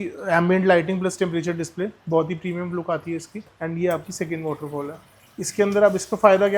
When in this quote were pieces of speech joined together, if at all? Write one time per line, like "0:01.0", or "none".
0:03.4